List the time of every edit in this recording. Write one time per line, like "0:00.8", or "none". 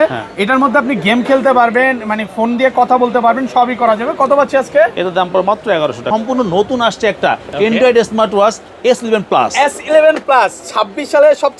0:06.1